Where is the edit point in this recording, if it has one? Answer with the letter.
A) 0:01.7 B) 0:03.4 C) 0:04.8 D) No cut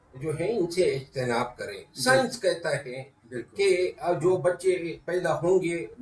D